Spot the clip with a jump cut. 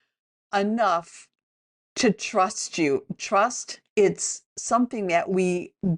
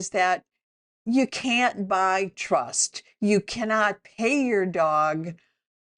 first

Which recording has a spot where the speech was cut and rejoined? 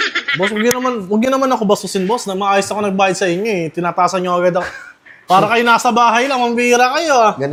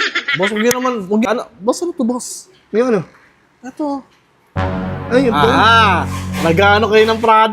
second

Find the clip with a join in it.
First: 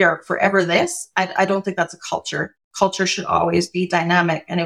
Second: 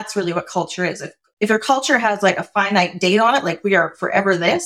first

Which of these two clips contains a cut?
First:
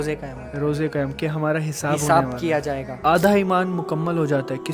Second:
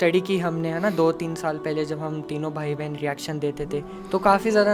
first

